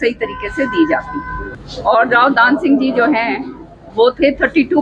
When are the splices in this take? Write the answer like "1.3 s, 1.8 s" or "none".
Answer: 1.4 s